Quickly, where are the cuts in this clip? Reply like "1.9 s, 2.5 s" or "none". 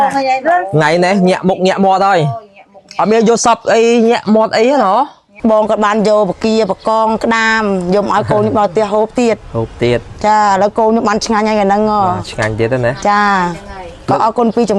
5.2 s